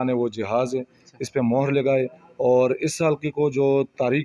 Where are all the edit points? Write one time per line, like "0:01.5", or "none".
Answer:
none